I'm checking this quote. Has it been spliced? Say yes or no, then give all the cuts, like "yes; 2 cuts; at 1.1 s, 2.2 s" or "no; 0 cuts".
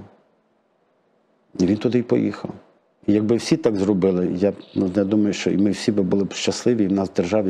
no; 0 cuts